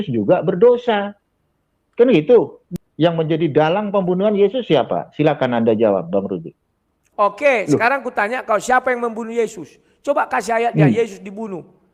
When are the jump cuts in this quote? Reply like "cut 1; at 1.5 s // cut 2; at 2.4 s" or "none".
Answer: cut 1; at 2.6 s // cut 2; at 7.0 s